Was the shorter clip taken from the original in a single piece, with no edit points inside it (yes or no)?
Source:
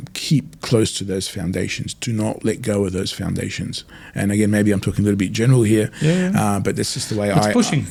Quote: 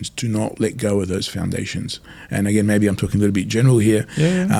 yes